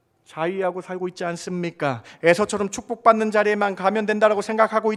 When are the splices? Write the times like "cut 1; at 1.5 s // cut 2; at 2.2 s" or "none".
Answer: none